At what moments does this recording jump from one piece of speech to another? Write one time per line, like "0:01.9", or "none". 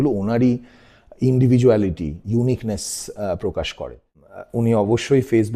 0:04.3